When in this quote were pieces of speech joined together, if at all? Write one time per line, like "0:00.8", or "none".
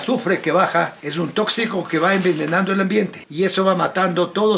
0:01.0
0:03.2